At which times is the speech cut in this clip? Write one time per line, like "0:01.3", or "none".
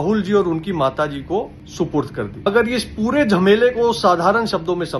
0:02.5